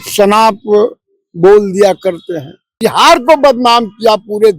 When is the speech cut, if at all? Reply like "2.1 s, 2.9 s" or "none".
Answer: 2.8 s